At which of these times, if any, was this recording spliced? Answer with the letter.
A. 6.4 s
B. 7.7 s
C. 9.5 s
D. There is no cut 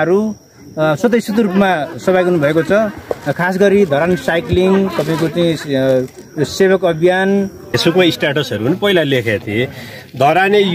B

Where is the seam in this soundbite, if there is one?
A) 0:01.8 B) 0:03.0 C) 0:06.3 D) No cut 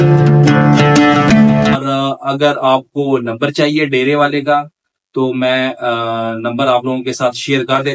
A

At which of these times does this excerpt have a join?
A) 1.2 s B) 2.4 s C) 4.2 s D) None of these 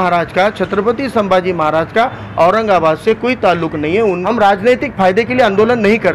C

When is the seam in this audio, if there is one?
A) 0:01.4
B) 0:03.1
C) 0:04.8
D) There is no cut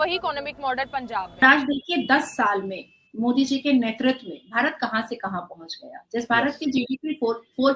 A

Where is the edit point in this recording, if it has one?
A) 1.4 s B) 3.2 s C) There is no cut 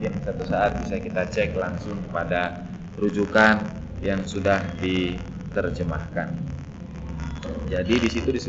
C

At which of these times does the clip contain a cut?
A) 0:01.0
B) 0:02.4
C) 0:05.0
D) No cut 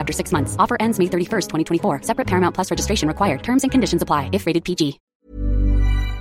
C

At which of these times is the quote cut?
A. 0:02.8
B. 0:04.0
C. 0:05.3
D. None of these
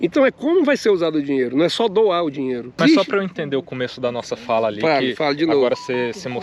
A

